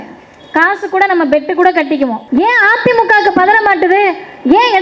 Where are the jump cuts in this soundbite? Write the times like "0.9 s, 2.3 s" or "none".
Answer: 2.2 s